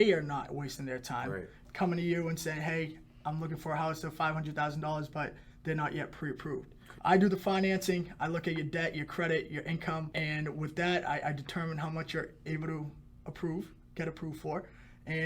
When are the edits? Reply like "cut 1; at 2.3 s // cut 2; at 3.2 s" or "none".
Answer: cut 1; at 1.6 s // cut 2; at 6.8 s // cut 3; at 10.1 s

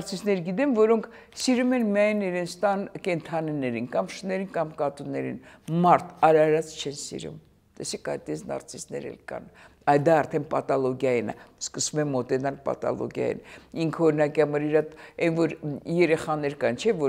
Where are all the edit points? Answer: none

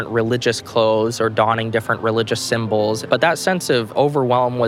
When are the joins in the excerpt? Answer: cut 1; at 3.0 s

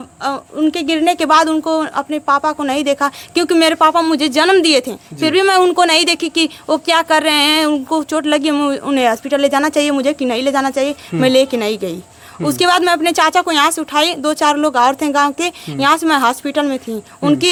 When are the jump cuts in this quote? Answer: none

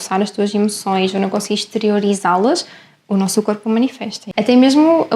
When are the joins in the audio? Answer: cut 1; at 4.2 s

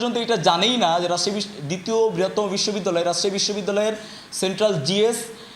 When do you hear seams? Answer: none

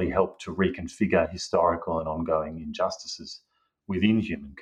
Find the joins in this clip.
none

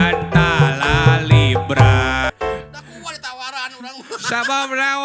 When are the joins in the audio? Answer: cut 1; at 2.3 s

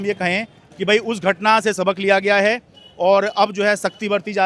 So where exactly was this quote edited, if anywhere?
none

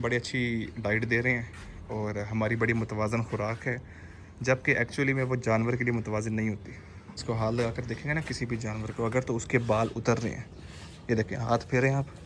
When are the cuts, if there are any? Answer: cut 1; at 7.2 s

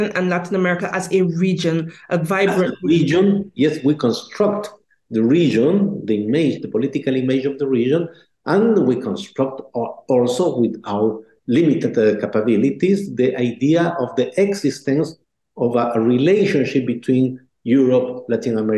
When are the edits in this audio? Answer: none

